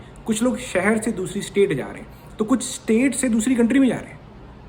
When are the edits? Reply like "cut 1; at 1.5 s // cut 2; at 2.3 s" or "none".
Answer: none